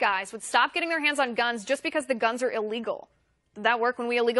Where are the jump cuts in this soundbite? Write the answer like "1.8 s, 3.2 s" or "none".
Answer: 3.1 s